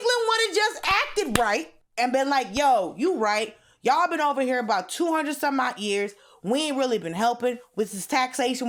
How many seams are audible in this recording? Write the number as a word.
one